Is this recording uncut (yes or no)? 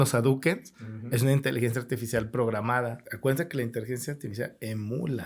no